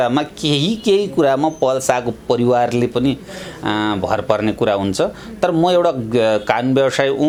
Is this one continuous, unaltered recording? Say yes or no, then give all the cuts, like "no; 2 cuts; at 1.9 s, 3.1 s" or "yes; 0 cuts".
yes; 0 cuts